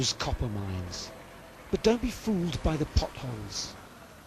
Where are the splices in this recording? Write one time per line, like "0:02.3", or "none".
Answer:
0:03.1